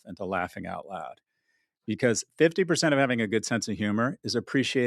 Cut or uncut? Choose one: uncut